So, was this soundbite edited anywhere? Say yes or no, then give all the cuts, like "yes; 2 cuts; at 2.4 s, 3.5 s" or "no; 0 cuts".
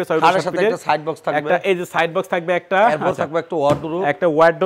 no; 0 cuts